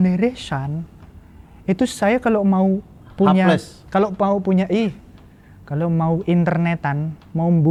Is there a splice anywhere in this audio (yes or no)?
no